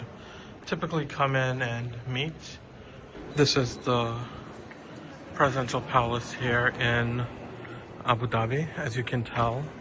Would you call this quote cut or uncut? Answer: cut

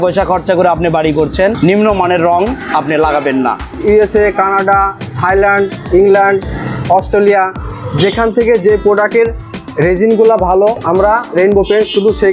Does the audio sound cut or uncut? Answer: cut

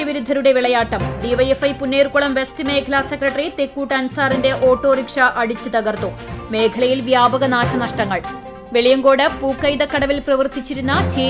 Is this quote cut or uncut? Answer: uncut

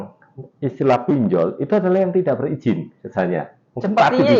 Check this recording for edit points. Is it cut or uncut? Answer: uncut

